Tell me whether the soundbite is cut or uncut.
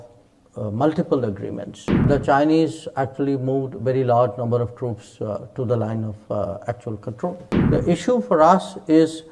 cut